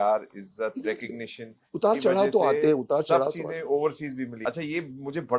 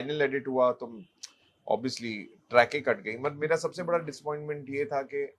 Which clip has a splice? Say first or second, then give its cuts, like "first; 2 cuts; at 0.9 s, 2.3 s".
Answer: first; 1 cut; at 4.4 s